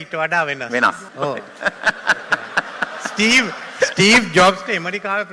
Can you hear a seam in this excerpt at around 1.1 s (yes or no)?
yes